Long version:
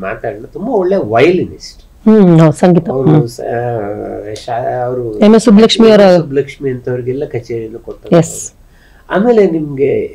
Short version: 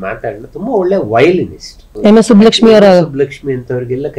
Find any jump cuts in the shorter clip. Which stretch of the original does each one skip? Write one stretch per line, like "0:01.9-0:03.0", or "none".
0:01.9-0:05.1